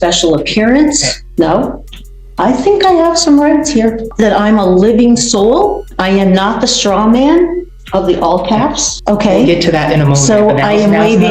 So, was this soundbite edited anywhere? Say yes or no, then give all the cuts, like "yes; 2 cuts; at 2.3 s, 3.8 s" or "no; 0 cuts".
yes; 4 cuts; at 1.1 s, 4.1 s, 5.9 s, 8.9 s